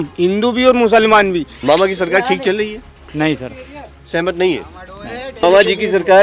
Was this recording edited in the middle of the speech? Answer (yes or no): yes